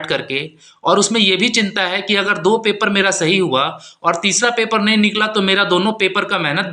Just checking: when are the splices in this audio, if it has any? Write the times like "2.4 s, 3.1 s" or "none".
none

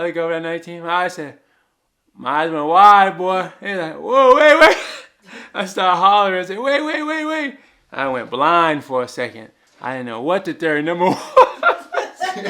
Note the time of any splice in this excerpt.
none

